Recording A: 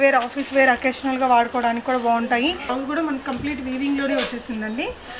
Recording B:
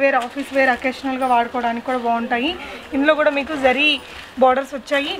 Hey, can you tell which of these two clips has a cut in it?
A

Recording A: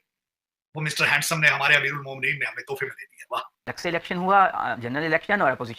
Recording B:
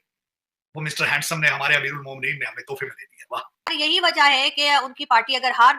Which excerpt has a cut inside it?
B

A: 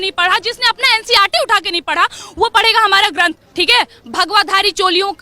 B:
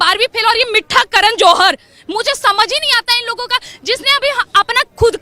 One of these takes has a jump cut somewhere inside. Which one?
A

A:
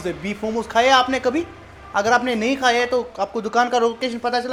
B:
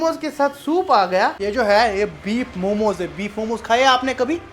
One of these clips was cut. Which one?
B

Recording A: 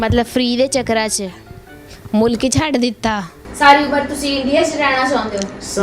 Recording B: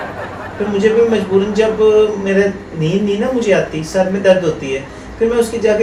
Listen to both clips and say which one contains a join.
A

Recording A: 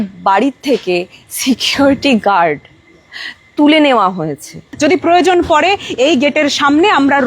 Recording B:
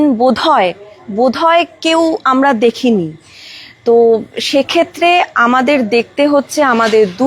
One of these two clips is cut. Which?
A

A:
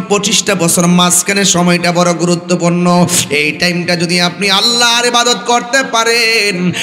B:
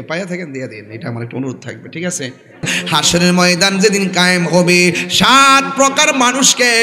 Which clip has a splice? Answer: B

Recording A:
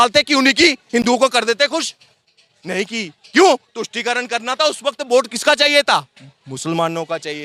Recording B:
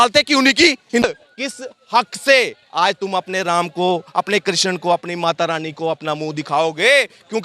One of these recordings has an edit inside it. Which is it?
B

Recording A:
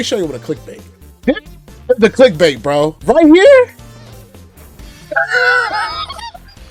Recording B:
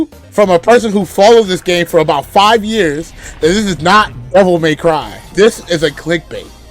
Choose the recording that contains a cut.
B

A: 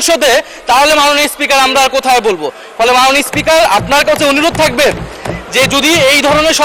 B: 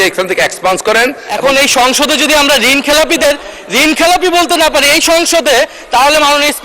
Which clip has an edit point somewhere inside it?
B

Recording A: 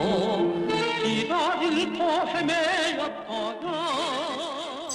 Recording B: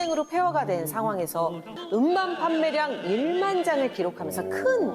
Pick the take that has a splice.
B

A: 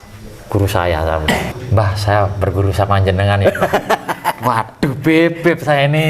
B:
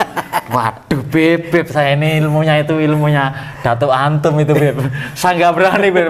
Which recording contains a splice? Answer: A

